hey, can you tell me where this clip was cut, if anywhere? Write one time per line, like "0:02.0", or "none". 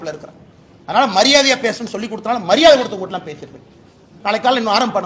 0:04.1